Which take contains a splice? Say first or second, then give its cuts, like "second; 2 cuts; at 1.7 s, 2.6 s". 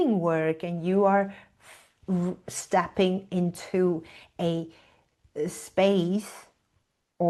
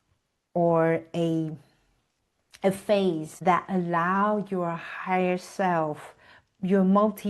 second; 1 cut; at 3.3 s